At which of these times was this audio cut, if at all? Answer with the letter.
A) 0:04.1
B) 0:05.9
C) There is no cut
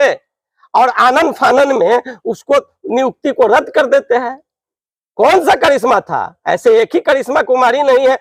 C